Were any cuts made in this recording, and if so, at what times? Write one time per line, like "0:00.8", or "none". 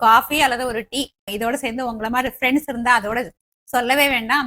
0:01.3